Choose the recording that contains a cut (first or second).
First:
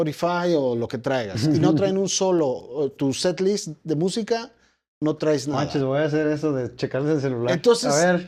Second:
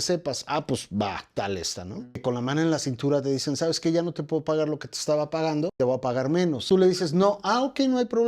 second